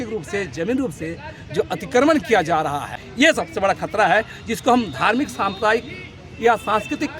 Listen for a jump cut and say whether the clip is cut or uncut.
cut